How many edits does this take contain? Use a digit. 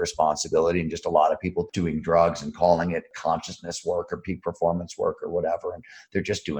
2